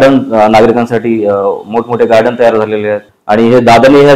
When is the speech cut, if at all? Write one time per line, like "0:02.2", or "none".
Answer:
0:03.1